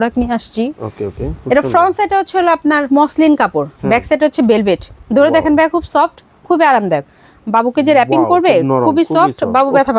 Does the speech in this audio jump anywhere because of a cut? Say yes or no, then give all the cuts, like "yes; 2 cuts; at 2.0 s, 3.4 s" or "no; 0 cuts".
no; 0 cuts